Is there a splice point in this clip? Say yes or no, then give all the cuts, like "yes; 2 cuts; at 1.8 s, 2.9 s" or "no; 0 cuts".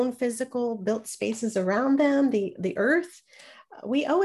no; 0 cuts